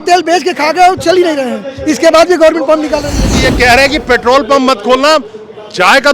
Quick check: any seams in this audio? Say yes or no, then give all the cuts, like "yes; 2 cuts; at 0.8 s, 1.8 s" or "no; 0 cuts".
yes; 1 cut; at 3.4 s